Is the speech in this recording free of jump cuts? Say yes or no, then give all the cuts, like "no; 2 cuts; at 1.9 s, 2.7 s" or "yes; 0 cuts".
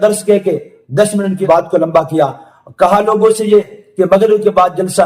no; 1 cut; at 1.4 s